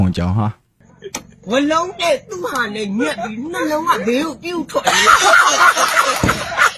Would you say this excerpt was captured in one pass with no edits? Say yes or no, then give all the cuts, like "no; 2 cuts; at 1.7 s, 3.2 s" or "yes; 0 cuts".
no; 1 cut; at 0.9 s